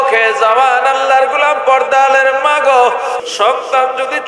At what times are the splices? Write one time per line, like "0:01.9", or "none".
0:03.2